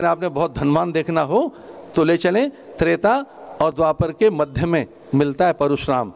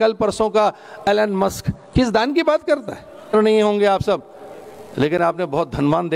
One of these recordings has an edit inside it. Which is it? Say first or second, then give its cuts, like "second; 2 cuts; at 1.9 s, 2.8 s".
second; 1 cut; at 3.3 s